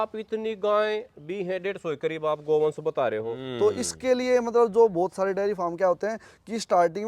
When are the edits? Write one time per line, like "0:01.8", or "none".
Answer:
0:03.4